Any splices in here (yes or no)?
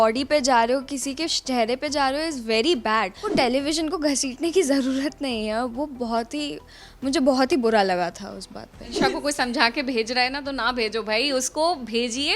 yes